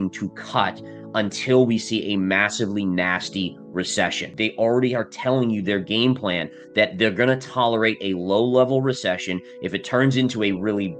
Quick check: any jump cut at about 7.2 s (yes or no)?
no